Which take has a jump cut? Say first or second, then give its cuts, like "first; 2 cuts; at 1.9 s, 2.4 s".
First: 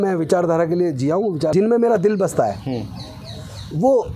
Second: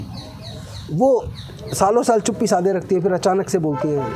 first; 1 cut; at 1.5 s